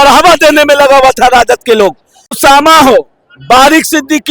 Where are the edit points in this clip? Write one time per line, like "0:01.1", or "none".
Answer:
0:02.4